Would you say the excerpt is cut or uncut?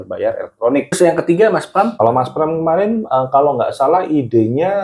cut